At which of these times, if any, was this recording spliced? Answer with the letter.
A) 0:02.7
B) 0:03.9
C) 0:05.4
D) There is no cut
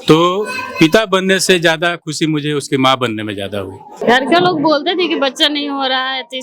B